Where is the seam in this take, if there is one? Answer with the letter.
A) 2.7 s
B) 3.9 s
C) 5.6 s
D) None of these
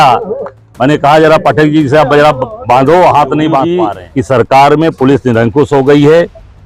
B